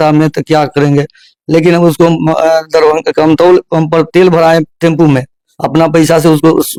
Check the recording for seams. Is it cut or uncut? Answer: uncut